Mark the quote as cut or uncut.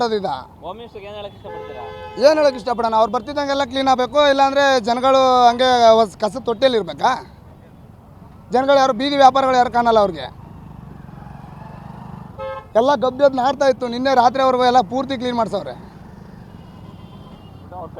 uncut